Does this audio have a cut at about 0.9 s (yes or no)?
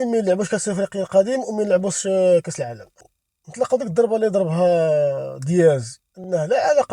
no